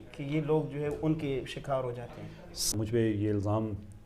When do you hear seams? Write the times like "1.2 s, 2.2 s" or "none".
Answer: 2.8 s